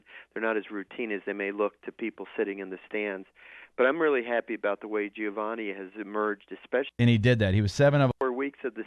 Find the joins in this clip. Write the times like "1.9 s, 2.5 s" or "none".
7.0 s, 8.1 s